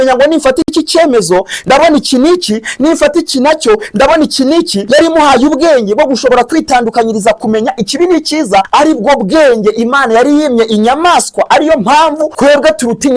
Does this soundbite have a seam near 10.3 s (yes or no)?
no